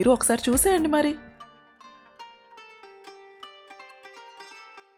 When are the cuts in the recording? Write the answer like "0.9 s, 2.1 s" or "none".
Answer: none

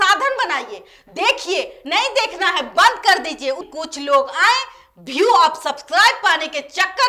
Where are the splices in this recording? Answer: 3.7 s

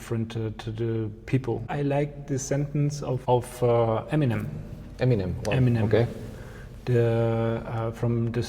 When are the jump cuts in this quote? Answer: 1.7 s, 3.2 s

